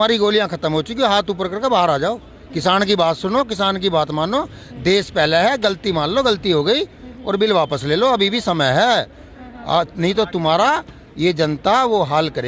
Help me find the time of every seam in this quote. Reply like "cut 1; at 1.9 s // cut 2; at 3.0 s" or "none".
none